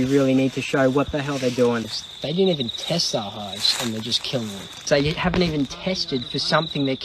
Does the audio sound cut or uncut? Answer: cut